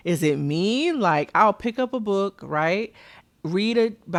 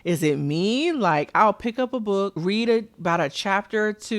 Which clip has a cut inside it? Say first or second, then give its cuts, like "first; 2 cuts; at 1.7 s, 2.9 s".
second; 1 cut; at 2.4 s